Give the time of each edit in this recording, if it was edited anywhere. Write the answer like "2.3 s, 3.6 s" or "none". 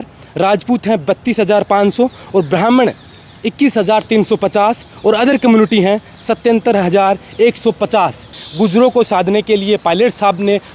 8.4 s